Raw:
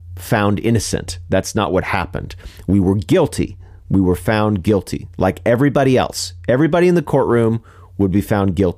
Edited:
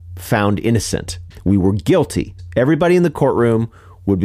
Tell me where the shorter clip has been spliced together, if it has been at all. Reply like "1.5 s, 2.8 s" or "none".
1.1 s, 2.4 s